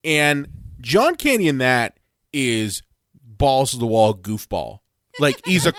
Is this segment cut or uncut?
uncut